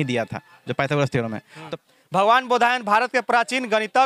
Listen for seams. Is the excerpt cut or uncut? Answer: cut